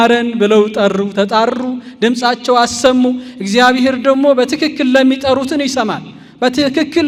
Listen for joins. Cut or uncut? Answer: uncut